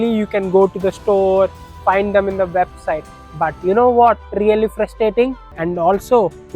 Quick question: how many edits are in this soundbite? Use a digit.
1